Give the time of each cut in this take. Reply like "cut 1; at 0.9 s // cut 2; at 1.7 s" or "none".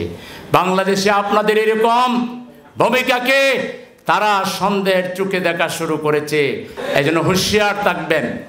cut 1; at 6.7 s